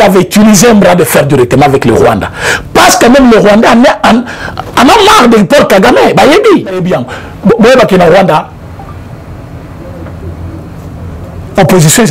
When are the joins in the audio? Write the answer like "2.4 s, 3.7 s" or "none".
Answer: 6.9 s